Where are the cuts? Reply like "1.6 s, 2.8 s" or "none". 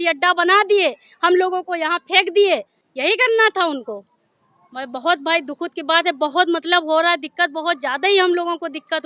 none